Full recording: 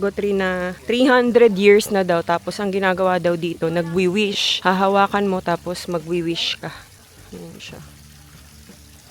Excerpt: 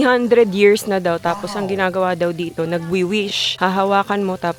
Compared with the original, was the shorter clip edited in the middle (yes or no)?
no